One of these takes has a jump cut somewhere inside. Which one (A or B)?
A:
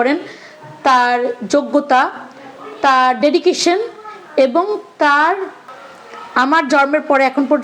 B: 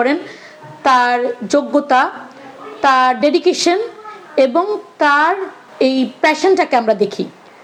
A